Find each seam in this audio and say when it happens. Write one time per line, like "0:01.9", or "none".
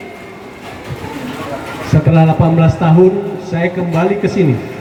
none